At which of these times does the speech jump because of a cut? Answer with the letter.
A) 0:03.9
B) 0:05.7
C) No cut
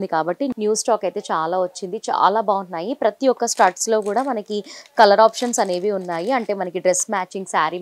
C